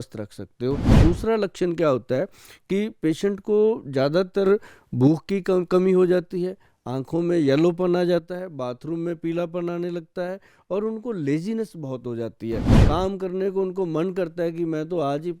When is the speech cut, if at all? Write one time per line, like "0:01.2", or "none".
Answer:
0:01.0
0:12.7

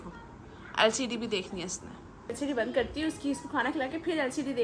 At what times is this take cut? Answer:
0:02.3

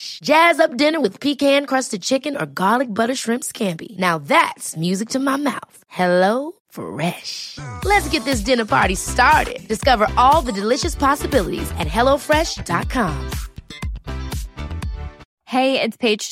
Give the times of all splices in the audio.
none

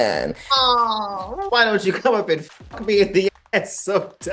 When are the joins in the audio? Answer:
0:01.4

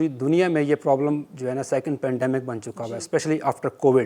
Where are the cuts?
none

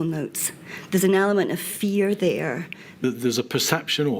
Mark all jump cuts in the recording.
0:03.0

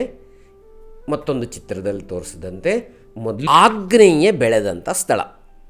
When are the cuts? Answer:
0:03.5

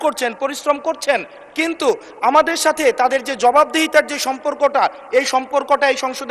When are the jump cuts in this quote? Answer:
none

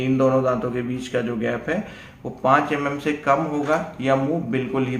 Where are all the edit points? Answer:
none

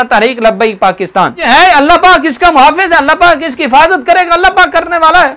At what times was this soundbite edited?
0:01.4

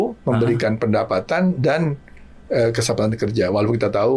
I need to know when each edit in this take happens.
none

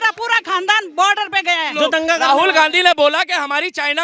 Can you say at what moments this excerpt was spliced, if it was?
0:01.7

